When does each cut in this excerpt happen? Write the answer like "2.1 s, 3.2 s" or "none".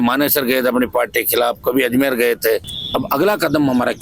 2.7 s

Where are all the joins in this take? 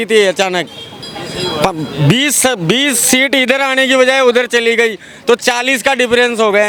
none

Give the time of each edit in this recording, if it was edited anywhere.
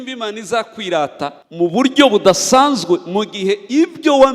1.4 s

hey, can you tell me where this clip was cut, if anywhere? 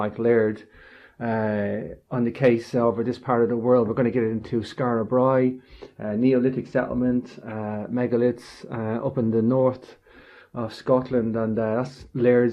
none

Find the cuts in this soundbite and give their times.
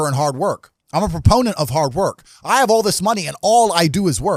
none

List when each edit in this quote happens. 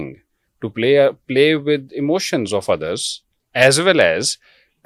none

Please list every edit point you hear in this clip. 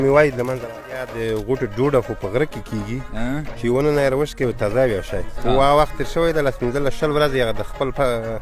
1.1 s

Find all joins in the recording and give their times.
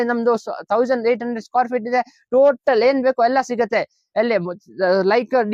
none

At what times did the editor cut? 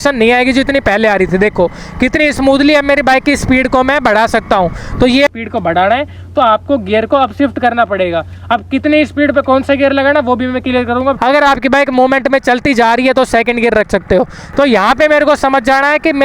5.3 s, 11.2 s, 14.3 s

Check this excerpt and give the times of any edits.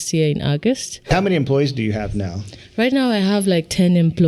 1.1 s

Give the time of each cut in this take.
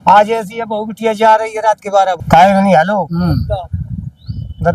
2.2 s

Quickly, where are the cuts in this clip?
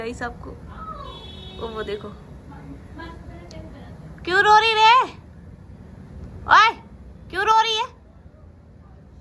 none

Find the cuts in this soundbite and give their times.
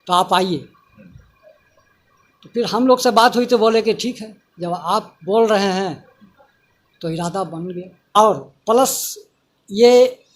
8.2 s

